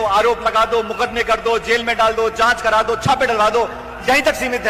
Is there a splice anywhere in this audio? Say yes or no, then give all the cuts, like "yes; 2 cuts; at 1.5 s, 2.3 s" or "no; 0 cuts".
no; 0 cuts